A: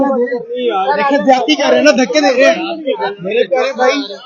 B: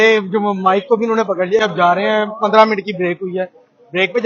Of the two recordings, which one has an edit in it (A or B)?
B